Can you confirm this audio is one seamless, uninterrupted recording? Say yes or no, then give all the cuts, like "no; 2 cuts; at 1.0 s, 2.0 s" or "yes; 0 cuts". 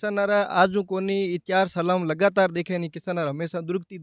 yes; 0 cuts